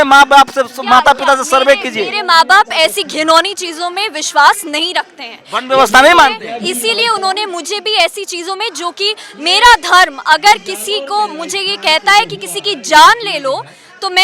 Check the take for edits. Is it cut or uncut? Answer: uncut